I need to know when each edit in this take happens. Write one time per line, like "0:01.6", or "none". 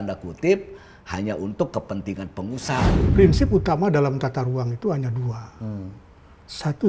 0:02.9